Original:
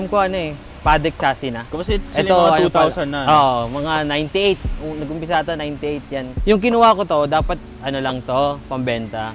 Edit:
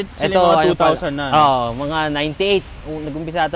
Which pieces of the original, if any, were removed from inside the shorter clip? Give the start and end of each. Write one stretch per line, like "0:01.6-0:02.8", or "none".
none